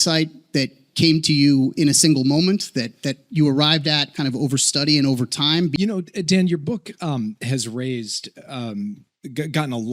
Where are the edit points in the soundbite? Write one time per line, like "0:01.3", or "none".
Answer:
0:05.8